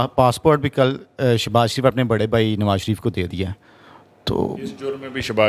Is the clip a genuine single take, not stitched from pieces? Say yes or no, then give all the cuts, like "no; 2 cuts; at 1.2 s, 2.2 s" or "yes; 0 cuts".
yes; 0 cuts